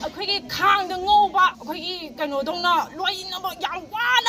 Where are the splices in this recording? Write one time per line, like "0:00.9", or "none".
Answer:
0:01.6